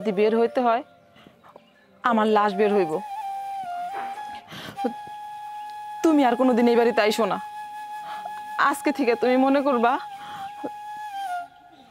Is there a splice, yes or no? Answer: no